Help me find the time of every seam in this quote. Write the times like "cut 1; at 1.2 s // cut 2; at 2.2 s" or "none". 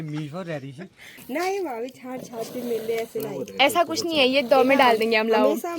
cut 1; at 1.1 s